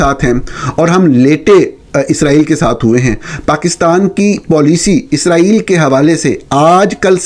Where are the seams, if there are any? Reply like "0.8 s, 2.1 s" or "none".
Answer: none